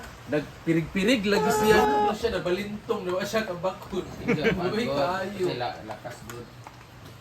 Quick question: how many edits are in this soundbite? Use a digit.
1